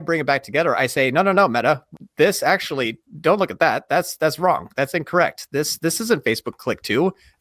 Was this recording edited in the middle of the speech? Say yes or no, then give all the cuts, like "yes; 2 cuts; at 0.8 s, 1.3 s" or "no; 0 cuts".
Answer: yes; 1 cut; at 2.0 s